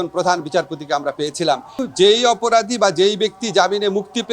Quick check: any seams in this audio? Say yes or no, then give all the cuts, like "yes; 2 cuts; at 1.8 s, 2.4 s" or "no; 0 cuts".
yes; 1 cut; at 1.8 s